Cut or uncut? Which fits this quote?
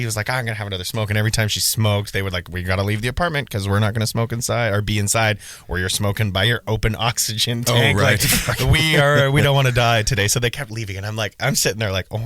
uncut